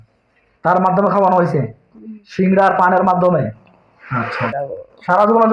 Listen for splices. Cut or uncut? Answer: cut